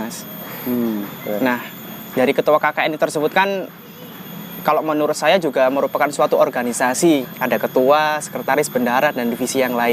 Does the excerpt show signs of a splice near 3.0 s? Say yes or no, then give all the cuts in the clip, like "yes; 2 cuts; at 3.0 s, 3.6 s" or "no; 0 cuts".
no; 1 cut; at 7.2 s